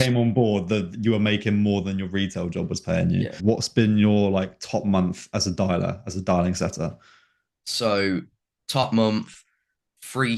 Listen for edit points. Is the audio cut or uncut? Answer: cut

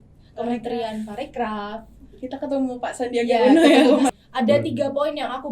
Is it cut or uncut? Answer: cut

